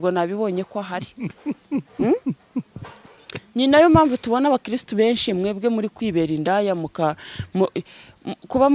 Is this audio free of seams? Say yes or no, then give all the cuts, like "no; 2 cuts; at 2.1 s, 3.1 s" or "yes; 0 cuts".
yes; 0 cuts